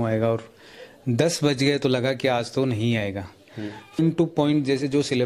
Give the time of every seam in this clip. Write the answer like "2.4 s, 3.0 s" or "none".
4.0 s